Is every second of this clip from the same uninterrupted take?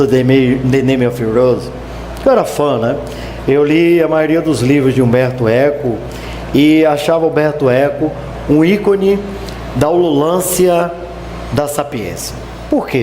no; 1 cut; at 3.4 s

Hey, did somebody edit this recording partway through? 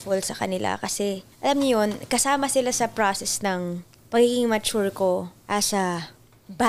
yes; 3 cuts; at 1.3 s, 3.9 s, 5.4 s

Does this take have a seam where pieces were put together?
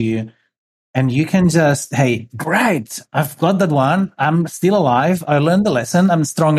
no; 0 cuts

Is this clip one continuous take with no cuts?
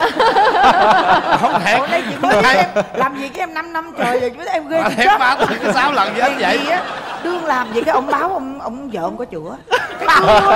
yes; 0 cuts

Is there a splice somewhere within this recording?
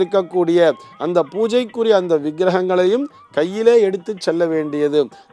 no; 0 cuts

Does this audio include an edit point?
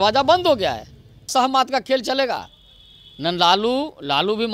yes; 1 cut; at 1.3 s

